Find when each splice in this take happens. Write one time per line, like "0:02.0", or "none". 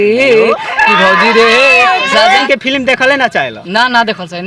0:02.4